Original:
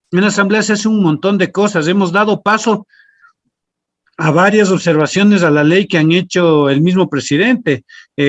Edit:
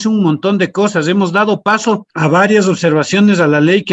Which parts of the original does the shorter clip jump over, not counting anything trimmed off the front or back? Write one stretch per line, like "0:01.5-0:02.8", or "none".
0:02.9-0:04.1